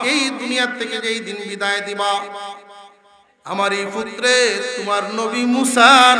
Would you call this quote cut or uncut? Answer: uncut